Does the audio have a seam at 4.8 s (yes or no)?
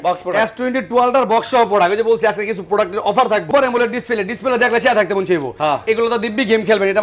no